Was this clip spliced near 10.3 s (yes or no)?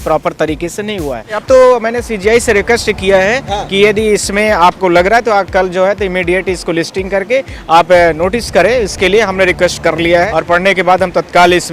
yes